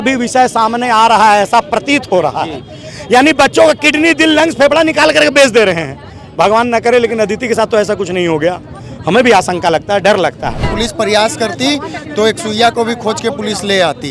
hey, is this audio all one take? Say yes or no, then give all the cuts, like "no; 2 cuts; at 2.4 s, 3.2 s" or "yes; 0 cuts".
no; 1 cut; at 10.7 s